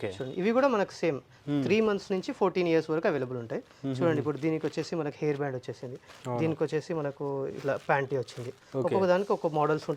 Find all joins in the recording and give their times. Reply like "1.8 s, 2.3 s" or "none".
none